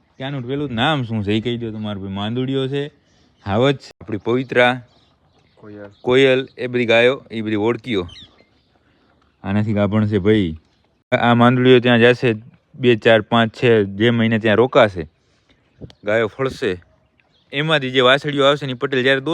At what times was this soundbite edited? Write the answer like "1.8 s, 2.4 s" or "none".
3.8 s, 11.1 s